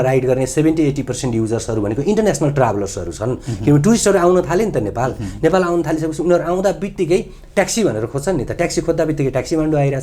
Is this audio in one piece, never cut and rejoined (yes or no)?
yes